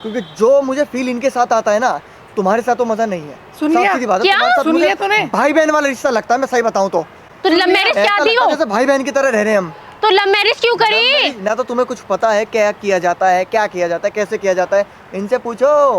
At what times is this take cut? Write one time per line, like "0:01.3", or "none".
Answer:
none